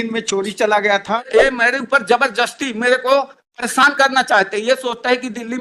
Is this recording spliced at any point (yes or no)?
yes